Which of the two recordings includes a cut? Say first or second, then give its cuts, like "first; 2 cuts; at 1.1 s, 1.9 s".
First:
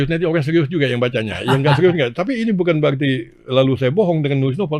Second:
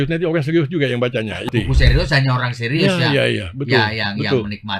second; 1 cut; at 1.5 s